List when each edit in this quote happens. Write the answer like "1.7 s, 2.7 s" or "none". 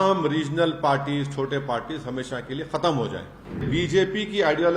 3.7 s